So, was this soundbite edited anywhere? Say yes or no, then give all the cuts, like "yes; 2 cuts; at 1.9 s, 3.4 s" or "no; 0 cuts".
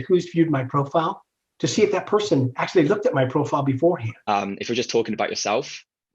yes; 1 cut; at 4.2 s